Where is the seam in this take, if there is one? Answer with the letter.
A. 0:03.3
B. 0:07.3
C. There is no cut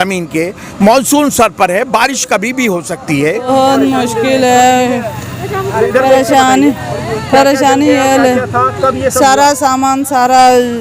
A